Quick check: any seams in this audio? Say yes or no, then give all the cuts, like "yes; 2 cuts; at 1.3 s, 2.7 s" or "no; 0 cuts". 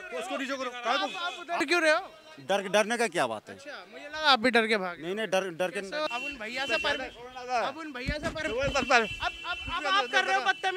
yes; 2 cuts; at 1.6 s, 6.1 s